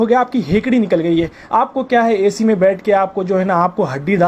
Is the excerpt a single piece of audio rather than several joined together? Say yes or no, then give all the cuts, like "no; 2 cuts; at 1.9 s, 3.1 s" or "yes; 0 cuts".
no; 1 cut; at 1.4 s